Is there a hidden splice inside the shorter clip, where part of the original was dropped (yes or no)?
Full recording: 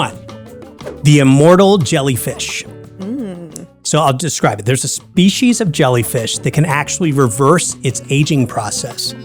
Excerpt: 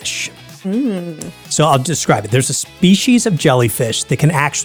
no